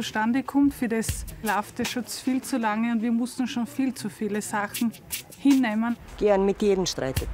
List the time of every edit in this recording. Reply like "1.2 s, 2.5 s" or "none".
1.4 s, 6.0 s